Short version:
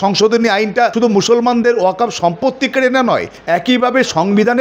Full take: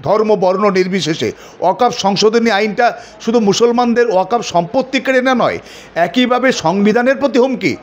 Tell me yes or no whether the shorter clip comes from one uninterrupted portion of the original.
no